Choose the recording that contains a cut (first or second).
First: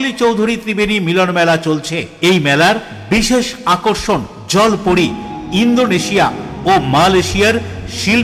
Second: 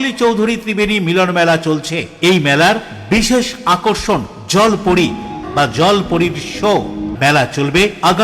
second